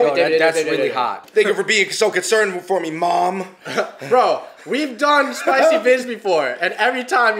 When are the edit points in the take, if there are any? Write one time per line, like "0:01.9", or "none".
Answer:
0:01.2